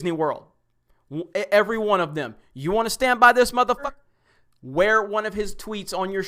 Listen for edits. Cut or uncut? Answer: cut